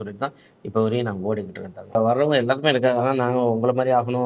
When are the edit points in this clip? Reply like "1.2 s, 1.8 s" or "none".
2.0 s